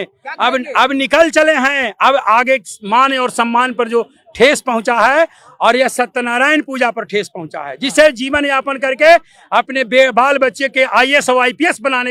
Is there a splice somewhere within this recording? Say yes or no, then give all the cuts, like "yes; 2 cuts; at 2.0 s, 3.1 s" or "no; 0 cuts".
no; 0 cuts